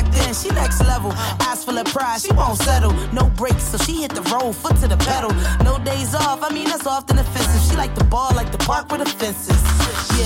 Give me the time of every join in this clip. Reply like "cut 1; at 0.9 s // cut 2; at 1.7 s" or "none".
none